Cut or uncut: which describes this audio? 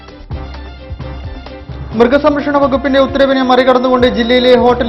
cut